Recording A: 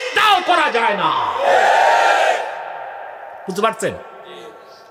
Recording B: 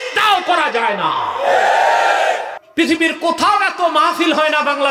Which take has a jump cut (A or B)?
B